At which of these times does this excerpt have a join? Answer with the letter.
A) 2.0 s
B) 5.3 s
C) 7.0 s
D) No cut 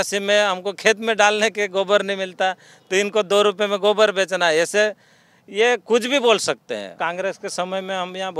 C